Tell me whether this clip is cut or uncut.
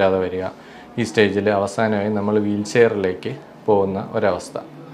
uncut